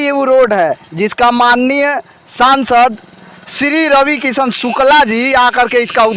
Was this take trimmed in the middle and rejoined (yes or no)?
no